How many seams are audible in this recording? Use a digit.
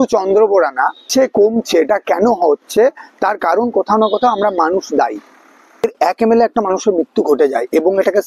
2